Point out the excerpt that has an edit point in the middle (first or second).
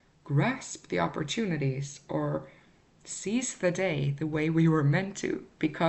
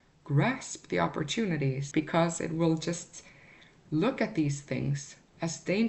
second